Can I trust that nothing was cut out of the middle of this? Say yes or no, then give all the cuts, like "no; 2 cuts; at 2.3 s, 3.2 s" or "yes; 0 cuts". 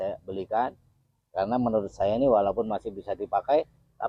yes; 0 cuts